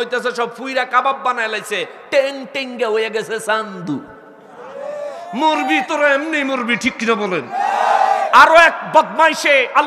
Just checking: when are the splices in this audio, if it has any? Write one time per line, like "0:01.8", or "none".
none